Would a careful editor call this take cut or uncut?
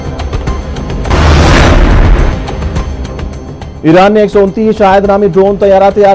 cut